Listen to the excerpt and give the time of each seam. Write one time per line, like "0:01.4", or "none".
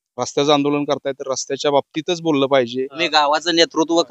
0:03.0